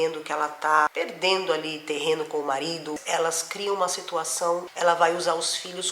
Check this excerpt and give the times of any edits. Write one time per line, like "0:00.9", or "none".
0:00.9
0:03.0
0:04.7